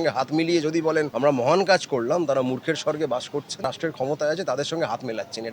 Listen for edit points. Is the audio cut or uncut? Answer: cut